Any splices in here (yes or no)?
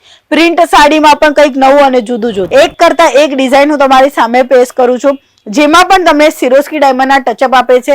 yes